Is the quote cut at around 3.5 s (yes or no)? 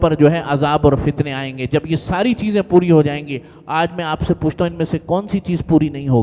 no